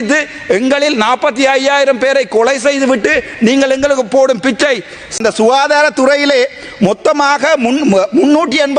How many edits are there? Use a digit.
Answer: 1